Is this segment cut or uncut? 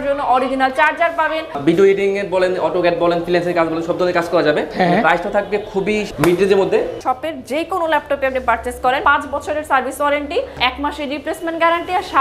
cut